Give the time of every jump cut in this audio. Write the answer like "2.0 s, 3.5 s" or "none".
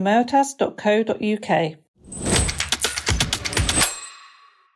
1.8 s, 3.8 s